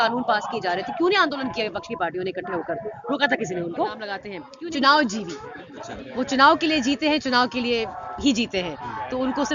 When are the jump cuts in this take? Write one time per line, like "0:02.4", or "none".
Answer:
0:04.4